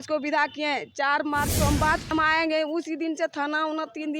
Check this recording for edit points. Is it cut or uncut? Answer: cut